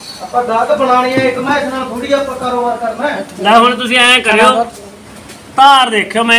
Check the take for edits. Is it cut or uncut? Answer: uncut